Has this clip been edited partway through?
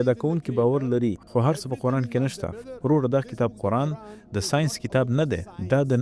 yes; 1 cut; at 1.2 s

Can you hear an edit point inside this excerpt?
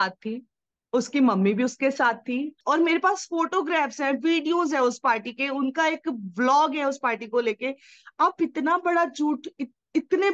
yes; 1 cut; at 2.6 s

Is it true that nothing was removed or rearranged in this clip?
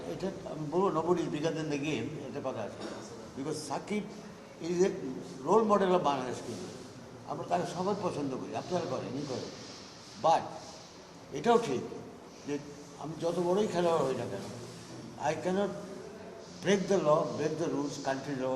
yes; 0 cuts

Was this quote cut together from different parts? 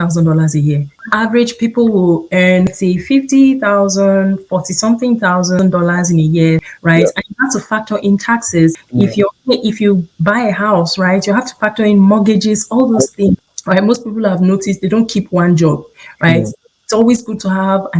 yes; 6 cuts; at 1.0 s, 2.7 s, 5.6 s, 6.7 s, 8.8 s, 13.5 s

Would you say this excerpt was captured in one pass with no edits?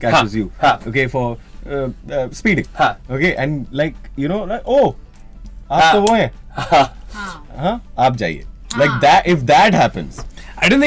yes; 0 cuts

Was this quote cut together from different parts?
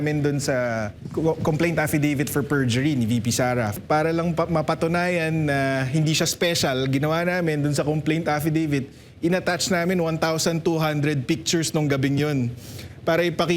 yes; 2 cuts; at 1.0 s, 3.7 s

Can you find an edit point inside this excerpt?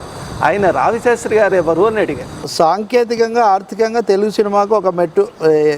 yes; 1 cut; at 2.4 s

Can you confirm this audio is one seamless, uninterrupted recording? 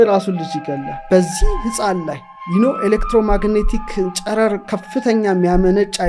no; 1 cut; at 1.0 s

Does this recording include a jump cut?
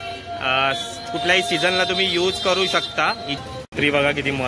yes; 1 cut; at 3.3 s

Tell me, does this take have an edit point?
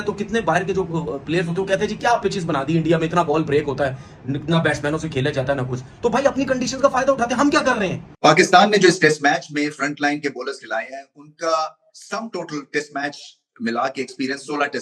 yes; 1 cut; at 8.2 s

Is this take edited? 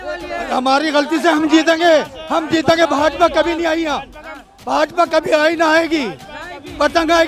no; 0 cuts

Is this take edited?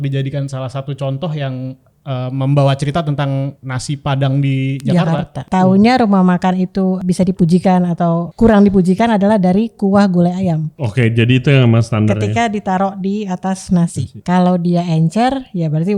yes; 6 cuts; at 3.7 s, 5.4 s, 7.0 s, 8.3 s, 10.8 s, 14.1 s

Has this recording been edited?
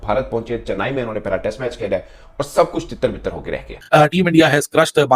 yes; 1 cut; at 3.8 s

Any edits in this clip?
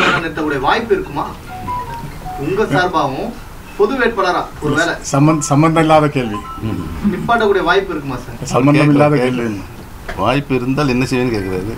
no; 0 cuts

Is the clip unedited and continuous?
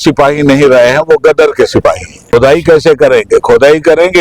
no; 1 cut; at 2.1 s

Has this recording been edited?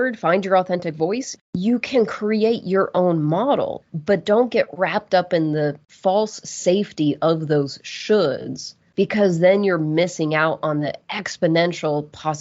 yes; 2 cuts; at 1.3 s, 3.7 s

